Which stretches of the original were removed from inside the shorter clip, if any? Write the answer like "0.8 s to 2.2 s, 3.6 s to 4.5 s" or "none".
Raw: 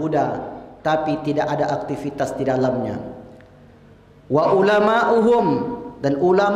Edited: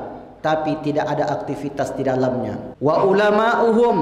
3.1 s to 4.2 s